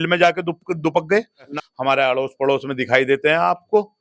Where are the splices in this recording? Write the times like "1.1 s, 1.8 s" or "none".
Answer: 1.5 s